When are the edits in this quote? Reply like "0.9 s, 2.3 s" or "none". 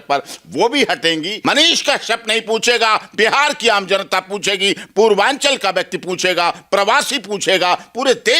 1.3 s